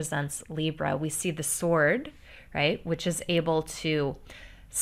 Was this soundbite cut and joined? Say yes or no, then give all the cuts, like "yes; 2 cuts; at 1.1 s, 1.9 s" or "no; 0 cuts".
no; 0 cuts